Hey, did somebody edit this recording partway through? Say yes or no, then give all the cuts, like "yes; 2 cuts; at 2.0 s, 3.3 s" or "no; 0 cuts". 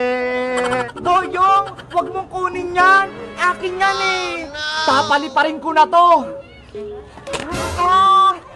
yes; 2 cuts; at 0.9 s, 4.6 s